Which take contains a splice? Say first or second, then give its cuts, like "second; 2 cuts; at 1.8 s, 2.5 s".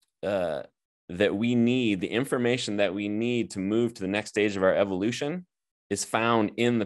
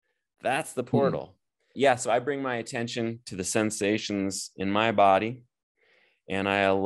second; 1 cut; at 1.7 s